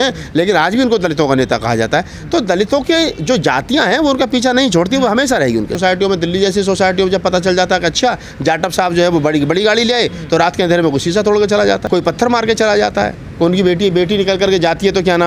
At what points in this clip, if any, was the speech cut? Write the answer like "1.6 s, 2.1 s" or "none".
5.7 s, 11.8 s